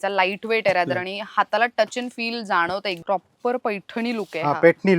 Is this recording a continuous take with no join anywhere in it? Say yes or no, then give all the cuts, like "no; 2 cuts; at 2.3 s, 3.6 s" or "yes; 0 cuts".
no; 1 cut; at 3.0 s